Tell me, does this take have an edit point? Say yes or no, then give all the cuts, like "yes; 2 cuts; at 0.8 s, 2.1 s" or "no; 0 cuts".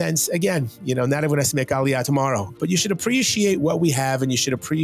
yes; 1 cut; at 2.6 s